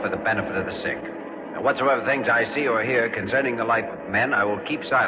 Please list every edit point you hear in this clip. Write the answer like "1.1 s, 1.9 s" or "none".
none